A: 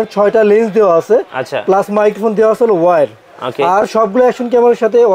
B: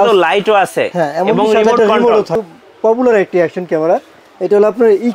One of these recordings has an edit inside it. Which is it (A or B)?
B